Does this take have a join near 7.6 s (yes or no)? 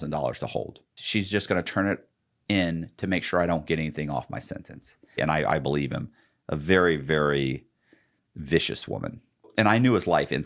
no